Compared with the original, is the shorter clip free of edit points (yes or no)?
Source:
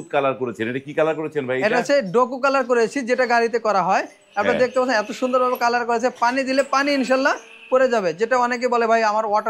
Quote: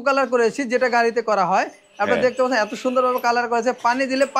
yes